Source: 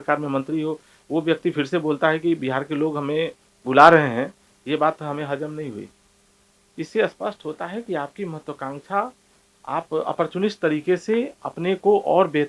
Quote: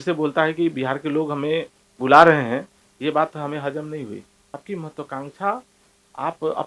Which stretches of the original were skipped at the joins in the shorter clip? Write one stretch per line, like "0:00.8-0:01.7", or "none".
0:06.3-0:08.1